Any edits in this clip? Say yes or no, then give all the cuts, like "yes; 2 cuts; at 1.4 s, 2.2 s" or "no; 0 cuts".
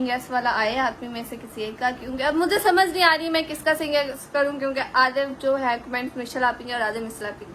no; 0 cuts